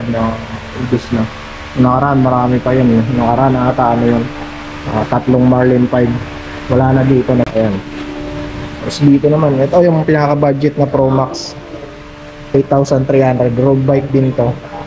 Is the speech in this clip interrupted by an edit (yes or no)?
yes